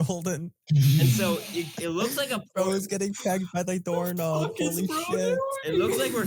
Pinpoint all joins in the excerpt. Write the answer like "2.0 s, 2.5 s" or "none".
none